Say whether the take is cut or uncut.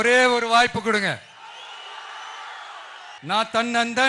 cut